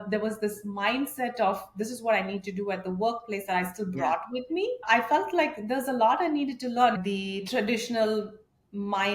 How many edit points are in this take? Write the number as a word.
two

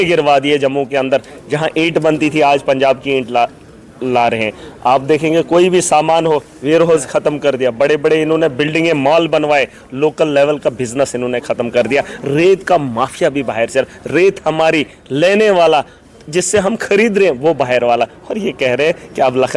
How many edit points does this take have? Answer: zero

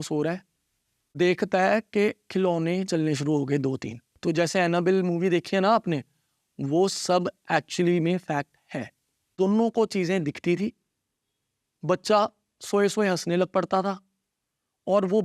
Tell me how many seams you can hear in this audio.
two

